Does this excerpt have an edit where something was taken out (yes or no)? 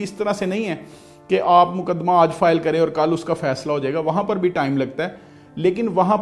no